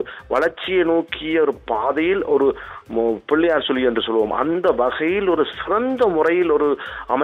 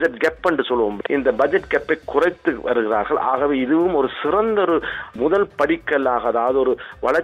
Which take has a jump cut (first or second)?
second